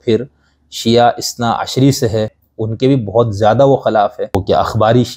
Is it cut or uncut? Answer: cut